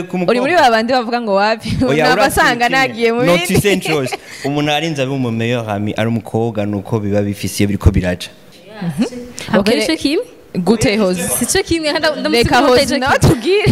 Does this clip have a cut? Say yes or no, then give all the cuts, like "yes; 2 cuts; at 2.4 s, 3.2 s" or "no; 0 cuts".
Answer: yes; 1 cut; at 8.5 s